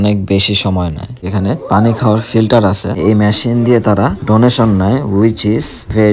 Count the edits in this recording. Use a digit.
2